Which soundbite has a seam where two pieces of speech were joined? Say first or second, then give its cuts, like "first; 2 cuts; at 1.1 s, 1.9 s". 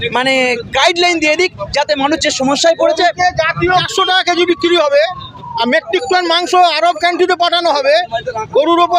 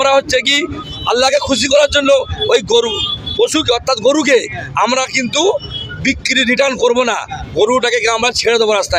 first; 1 cut; at 3.8 s